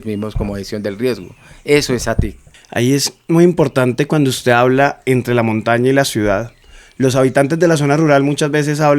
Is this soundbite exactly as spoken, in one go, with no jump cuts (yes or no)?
yes